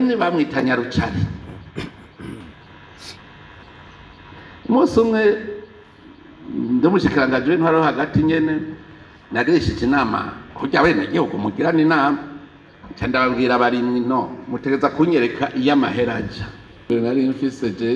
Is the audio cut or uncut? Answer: cut